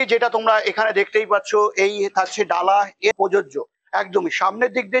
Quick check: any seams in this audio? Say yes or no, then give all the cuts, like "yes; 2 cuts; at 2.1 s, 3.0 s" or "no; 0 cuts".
yes; 1 cut; at 3.2 s